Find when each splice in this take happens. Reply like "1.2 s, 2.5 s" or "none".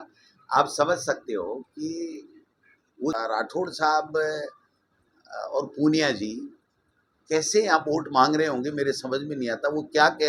3.2 s